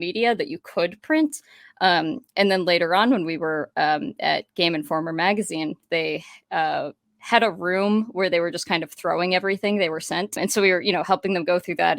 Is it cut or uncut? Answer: cut